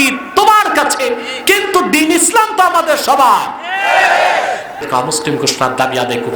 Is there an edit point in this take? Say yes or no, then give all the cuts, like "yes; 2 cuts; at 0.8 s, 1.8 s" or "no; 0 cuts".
yes; 1 cut; at 4.9 s